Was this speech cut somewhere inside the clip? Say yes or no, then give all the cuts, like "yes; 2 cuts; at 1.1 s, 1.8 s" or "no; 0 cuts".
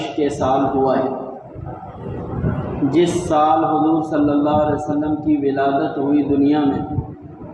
no; 0 cuts